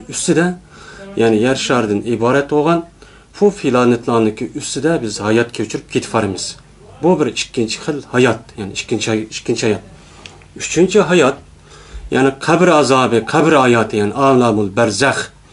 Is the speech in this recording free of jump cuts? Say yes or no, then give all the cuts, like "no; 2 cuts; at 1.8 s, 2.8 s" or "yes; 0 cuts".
yes; 0 cuts